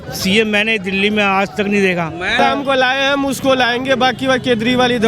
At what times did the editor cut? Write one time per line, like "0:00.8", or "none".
0:02.4